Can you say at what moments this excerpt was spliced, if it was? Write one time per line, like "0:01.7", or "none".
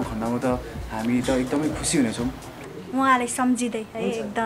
0:02.6

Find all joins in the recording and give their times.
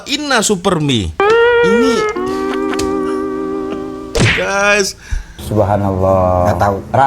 0:05.4

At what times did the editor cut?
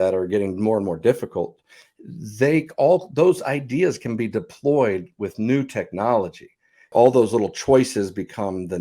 0:06.9

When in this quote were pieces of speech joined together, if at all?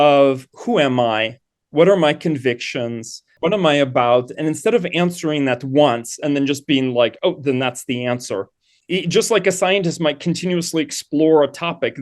0:03.4
0:08.7

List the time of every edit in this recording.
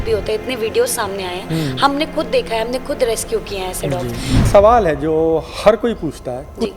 0:04.4

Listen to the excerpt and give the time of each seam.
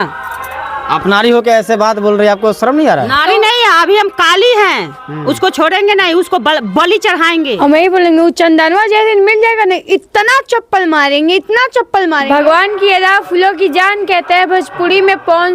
0:07.5
0:12.2

